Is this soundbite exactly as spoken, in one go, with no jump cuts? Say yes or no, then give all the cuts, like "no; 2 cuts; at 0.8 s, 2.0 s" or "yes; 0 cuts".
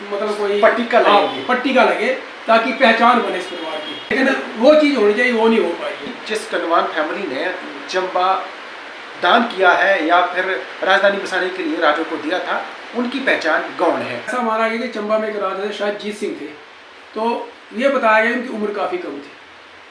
no; 3 cuts; at 4.1 s, 6.1 s, 14.3 s